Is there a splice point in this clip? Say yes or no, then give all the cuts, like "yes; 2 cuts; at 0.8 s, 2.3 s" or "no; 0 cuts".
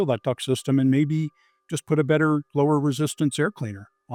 no; 0 cuts